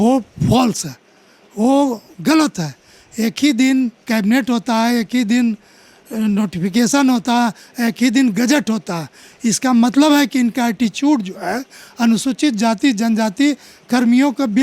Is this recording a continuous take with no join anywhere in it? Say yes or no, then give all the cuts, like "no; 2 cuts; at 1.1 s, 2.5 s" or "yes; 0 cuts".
yes; 0 cuts